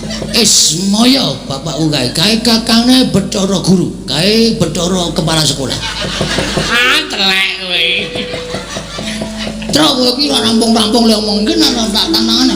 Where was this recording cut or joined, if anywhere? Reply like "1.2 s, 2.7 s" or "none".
6.6 s